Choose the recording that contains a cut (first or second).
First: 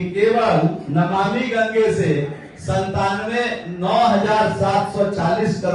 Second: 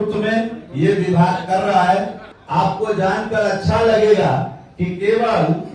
second